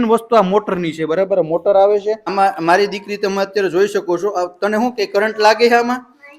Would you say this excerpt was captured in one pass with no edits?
no; 1 cut; at 2.3 s

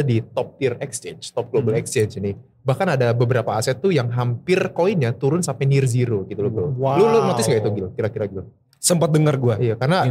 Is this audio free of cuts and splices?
yes; 0 cuts

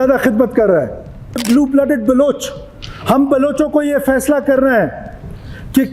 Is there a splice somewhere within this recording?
yes; 1 cut; at 1.4 s

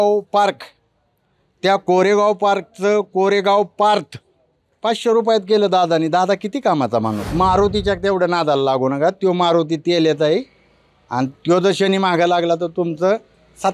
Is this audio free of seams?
no; 1 cut; at 7.2 s

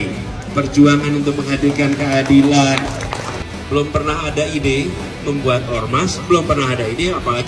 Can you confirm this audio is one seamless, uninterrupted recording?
no; 1 cut; at 3.4 s

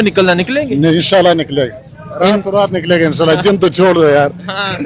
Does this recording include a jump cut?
no; 0 cuts

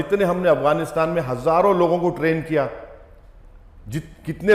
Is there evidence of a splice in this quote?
no; 0 cuts

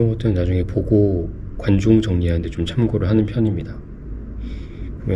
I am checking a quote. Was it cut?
no; 0 cuts

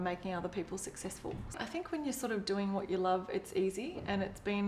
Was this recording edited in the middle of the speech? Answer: yes; 1 cut; at 1.5 s

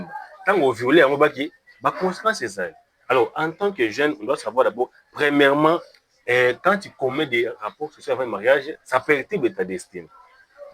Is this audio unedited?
yes; 0 cuts

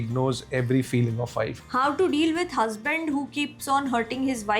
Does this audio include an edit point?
yes; 1 cut; at 1.6 s

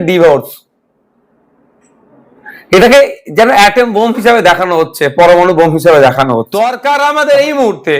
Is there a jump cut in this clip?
yes; 1 cut; at 6.5 s

